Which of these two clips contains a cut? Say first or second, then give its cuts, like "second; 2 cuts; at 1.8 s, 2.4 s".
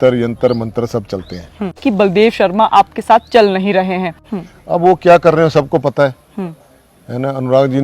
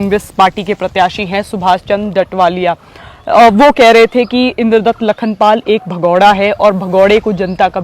first; 2 cuts; at 1.8 s, 4.2 s